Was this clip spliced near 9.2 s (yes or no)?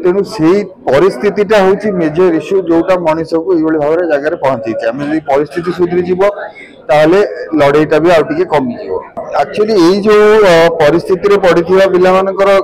yes